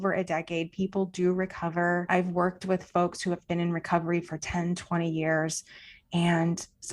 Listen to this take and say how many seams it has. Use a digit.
1